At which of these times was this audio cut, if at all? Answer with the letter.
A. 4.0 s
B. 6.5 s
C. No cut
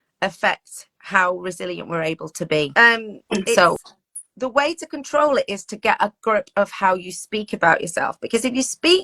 A